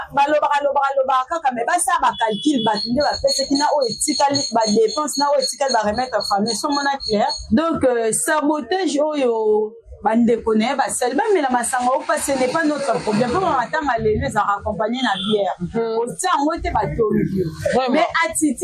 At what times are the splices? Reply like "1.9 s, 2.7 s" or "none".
7.4 s